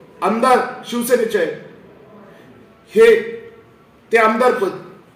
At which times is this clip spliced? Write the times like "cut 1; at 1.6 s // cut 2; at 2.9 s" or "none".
none